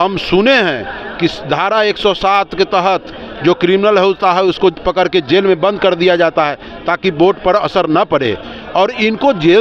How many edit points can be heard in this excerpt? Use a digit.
0